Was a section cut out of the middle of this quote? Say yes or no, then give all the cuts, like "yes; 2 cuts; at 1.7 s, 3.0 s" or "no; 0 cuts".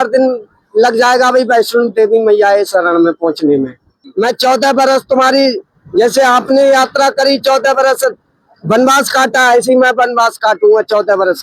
yes; 1 cut; at 4.0 s